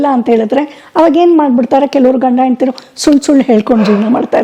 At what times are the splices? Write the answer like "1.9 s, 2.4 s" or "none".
none